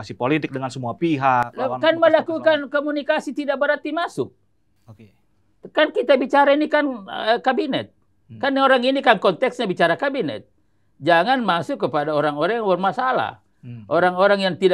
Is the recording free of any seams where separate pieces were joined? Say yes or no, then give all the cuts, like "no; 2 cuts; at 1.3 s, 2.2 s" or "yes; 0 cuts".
yes; 0 cuts